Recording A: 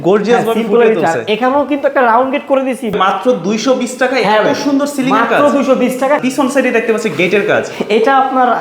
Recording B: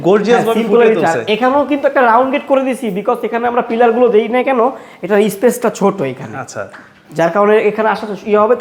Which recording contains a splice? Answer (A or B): A